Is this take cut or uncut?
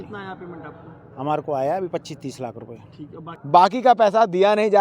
cut